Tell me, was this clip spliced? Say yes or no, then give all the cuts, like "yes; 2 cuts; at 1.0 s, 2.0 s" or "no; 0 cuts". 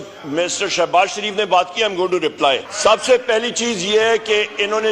yes; 1 cut; at 2.7 s